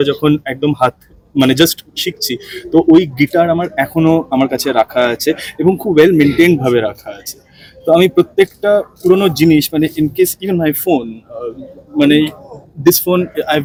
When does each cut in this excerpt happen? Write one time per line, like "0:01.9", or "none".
none